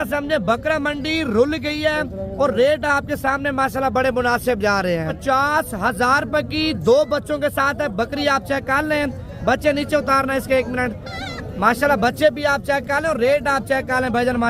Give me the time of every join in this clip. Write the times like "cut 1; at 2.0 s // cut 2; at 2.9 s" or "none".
cut 1; at 5.1 s